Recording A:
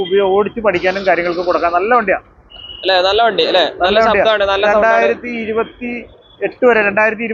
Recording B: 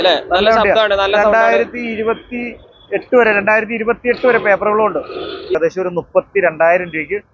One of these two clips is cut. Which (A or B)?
B